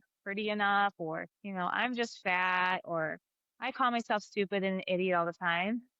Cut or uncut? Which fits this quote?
uncut